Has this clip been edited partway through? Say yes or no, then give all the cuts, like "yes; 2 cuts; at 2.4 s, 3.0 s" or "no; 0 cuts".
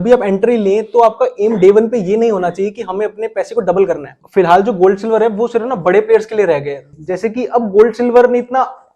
yes; 2 cuts; at 4.1 s, 6.9 s